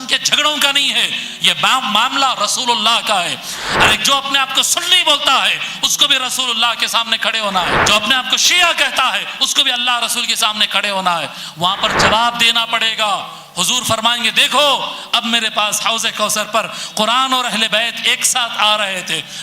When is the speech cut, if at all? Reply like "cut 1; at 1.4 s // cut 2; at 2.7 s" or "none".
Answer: cut 1; at 7.8 s

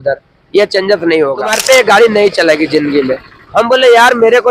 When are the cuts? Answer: cut 1; at 1.6 s

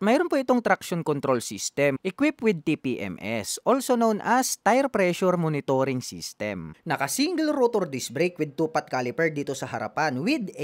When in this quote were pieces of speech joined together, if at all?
cut 1; at 2.0 s // cut 2; at 6.7 s

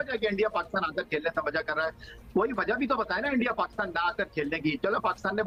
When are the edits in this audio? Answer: none

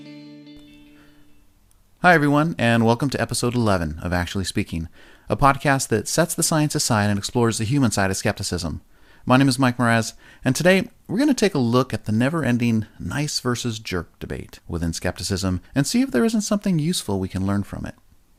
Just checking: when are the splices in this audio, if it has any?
none

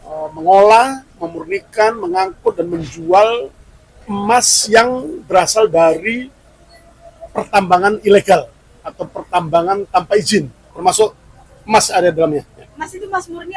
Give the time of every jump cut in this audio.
cut 1; at 10.6 s

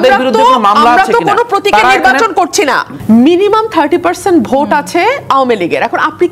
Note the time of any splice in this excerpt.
cut 1; at 2.9 s

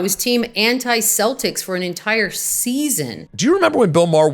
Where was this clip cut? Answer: cut 1; at 3.2 s

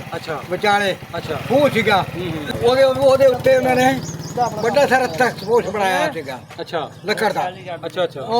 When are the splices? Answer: cut 1; at 2.5 s

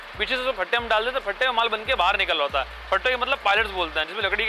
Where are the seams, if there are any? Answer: none

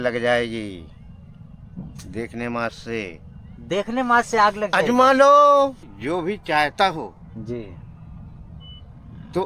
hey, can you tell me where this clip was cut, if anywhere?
cut 1; at 5.9 s

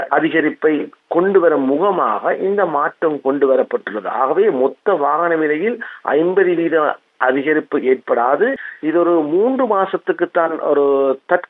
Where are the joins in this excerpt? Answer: cut 1; at 8.7 s

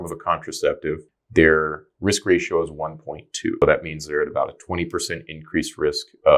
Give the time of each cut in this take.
cut 1; at 1.1 s // cut 2; at 3.6 s

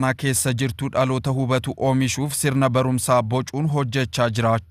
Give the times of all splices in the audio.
none

